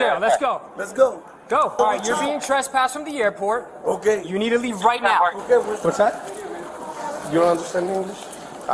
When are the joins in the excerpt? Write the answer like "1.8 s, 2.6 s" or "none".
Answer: 1.8 s, 5.7 s